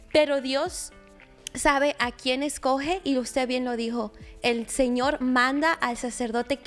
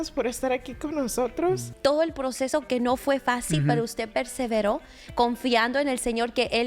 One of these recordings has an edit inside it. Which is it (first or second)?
second